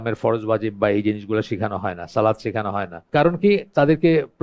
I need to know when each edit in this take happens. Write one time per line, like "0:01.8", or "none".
0:03.0